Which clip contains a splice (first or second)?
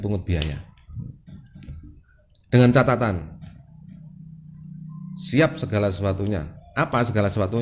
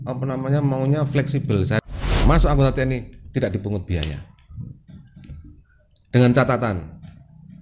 second